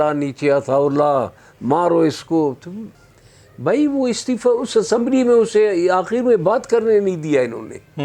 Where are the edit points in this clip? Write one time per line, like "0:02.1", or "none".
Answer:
0:03.0